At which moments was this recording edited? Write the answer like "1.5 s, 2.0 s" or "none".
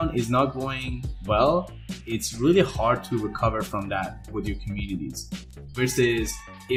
none

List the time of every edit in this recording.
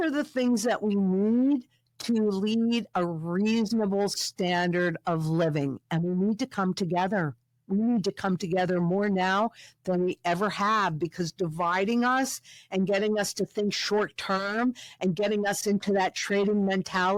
none

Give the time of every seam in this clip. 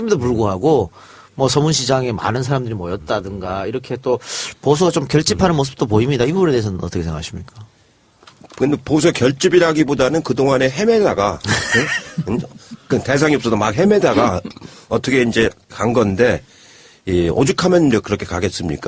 8.1 s

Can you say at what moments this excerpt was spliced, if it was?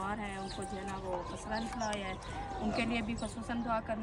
2.2 s

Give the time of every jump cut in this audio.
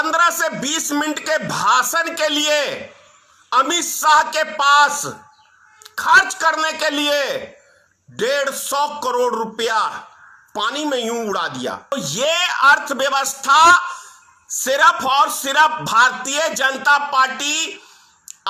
11.9 s

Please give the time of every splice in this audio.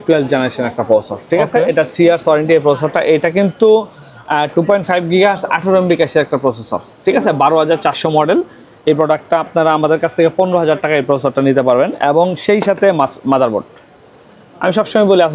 none

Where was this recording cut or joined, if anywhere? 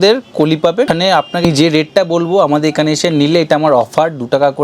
0.9 s

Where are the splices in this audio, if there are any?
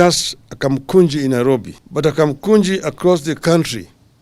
1.8 s

